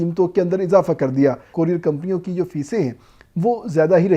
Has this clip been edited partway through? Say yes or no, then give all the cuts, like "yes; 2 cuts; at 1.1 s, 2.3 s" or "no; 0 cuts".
yes; 1 cut; at 1.4 s